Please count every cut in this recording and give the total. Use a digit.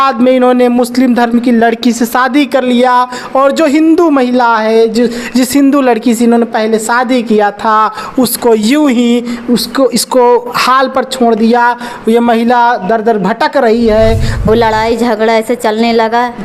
1